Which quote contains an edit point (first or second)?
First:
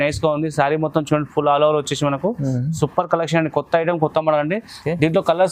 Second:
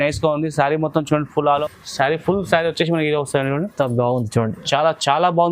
second